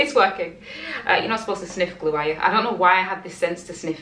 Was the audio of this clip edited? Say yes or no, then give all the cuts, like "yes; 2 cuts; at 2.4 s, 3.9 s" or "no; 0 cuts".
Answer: no; 0 cuts